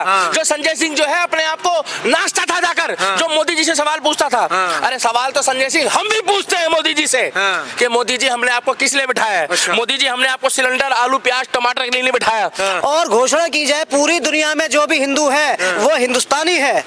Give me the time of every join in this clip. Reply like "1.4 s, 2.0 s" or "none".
12.8 s